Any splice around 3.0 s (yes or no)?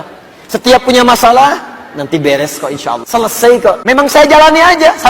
yes